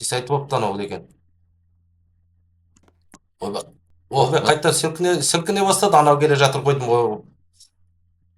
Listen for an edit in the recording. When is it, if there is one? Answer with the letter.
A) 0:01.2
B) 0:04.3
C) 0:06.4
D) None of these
B